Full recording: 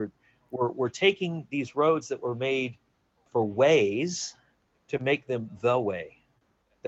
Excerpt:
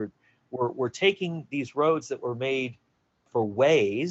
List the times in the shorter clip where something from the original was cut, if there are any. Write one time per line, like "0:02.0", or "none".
none

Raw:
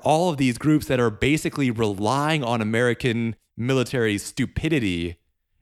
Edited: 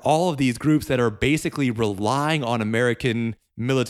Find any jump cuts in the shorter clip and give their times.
none

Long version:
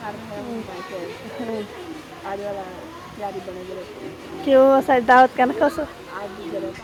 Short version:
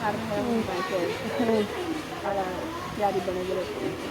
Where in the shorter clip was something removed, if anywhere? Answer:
0:02.3

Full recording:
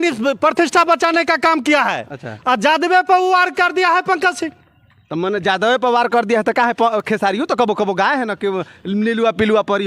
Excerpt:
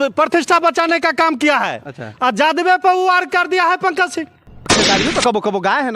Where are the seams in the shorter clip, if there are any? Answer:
0:04.8

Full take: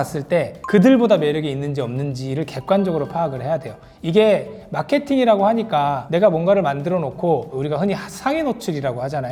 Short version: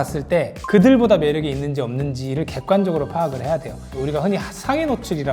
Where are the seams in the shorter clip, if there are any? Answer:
0:03.9

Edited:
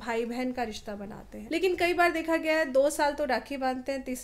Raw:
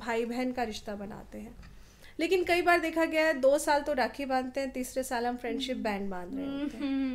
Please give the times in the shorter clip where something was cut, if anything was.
0:01.3

